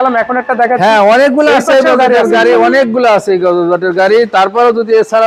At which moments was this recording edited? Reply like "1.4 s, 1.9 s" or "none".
none